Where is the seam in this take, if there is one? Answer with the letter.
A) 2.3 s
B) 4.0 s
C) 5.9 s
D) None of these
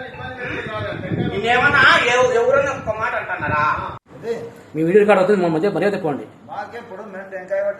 B